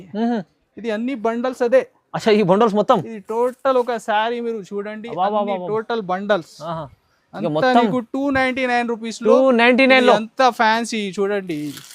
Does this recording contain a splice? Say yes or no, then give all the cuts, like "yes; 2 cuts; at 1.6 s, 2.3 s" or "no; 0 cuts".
no; 0 cuts